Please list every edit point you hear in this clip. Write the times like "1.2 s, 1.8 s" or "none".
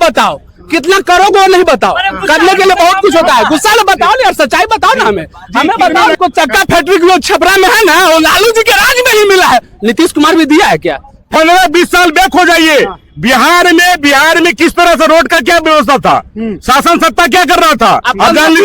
6.2 s, 11.3 s